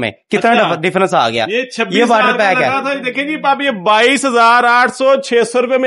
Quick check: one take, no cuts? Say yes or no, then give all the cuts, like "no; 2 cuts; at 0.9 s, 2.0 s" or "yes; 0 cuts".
yes; 0 cuts